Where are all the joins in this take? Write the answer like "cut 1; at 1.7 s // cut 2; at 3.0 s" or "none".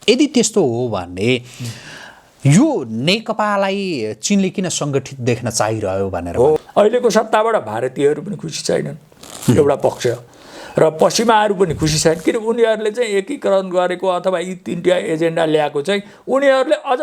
cut 1; at 6.6 s